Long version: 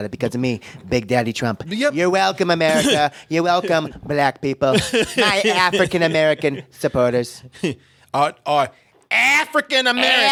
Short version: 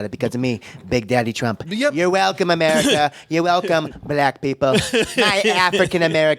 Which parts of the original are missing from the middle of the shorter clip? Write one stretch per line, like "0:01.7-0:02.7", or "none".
none